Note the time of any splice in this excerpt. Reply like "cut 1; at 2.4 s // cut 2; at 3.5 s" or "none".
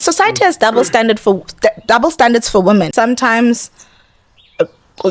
cut 1; at 2.9 s